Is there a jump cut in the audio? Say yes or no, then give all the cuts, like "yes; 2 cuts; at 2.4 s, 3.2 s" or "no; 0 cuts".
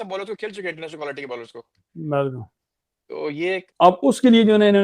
yes; 1 cut; at 3.6 s